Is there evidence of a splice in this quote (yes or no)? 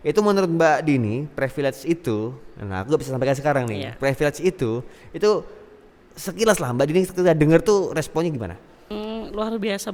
no